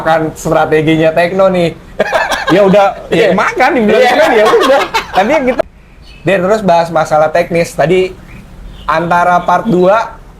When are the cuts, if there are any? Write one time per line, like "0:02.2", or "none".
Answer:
0:05.6